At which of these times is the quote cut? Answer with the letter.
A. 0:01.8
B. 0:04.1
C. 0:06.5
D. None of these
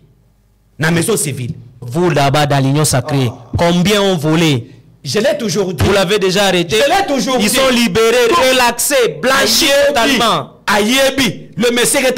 A